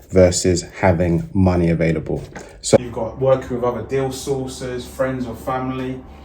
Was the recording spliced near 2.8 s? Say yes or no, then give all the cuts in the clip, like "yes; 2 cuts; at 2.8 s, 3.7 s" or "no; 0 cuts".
yes; 1 cut; at 2.8 s